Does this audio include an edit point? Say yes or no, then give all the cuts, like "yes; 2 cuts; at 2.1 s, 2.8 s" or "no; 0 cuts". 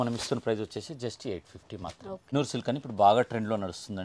yes; 1 cut; at 2.3 s